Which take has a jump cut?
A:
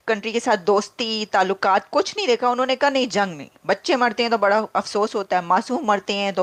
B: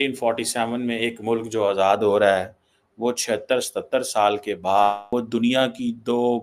B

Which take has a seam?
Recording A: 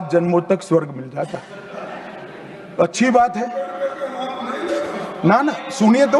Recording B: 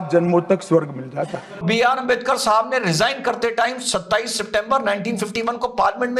B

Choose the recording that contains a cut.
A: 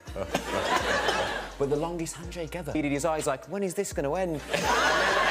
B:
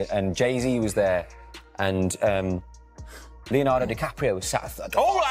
A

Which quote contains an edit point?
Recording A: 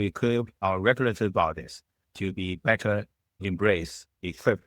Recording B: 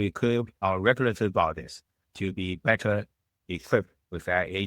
B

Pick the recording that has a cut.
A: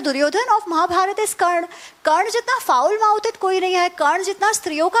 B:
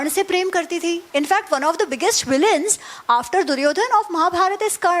B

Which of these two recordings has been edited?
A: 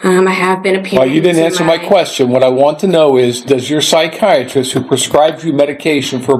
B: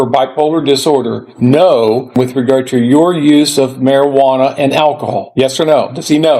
B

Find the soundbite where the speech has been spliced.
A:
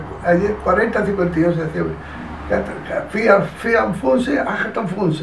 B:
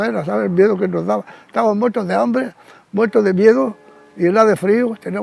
B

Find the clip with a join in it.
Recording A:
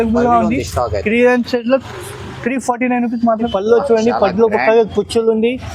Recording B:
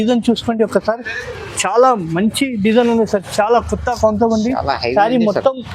A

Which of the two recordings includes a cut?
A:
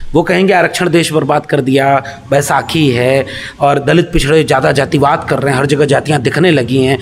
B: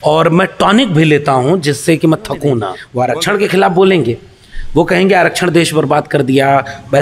B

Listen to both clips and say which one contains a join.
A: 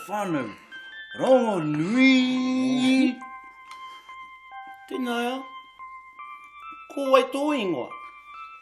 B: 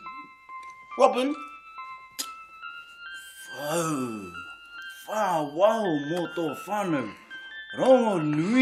A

